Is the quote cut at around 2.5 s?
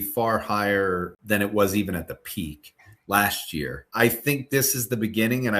no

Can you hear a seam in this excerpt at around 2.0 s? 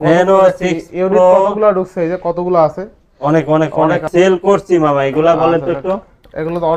no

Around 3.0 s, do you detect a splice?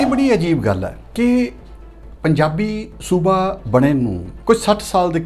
no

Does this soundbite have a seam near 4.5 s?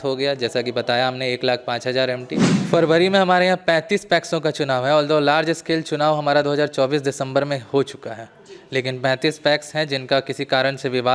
no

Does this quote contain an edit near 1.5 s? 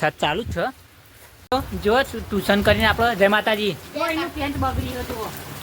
yes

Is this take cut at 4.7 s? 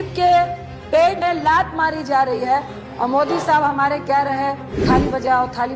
yes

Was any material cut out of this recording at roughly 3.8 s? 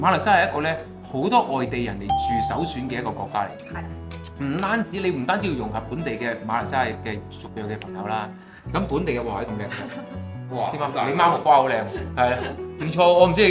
no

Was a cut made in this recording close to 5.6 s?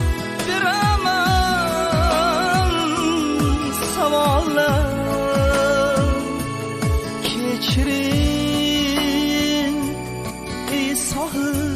no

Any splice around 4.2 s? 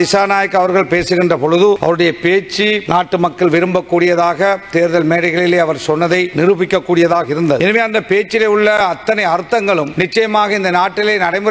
no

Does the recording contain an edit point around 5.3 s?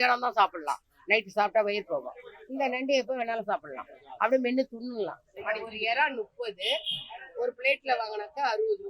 yes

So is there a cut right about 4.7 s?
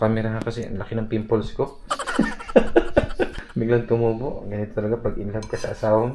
no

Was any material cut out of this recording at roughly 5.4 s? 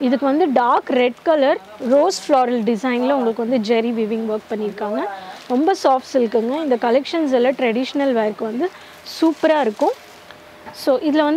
no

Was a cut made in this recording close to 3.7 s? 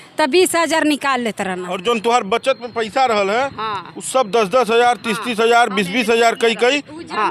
no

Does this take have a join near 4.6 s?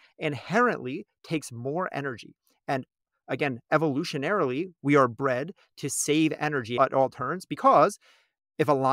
no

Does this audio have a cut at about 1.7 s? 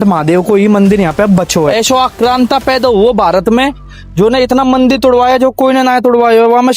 yes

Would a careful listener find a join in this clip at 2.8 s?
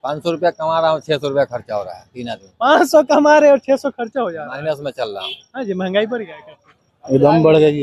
no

